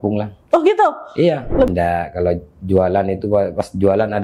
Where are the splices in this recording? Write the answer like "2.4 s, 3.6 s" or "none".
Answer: 1.7 s